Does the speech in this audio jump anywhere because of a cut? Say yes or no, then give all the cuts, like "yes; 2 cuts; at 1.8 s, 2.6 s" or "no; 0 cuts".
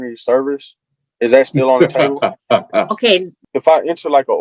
yes; 1 cut; at 3.4 s